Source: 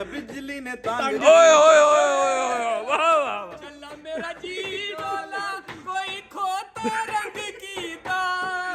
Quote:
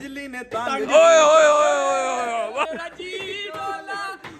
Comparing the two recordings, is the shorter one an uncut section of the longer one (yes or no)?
no